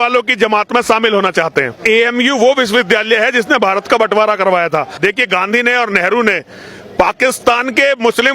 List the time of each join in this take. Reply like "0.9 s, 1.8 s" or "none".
1.8 s, 4.9 s